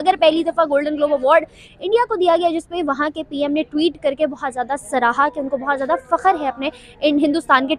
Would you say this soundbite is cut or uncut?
uncut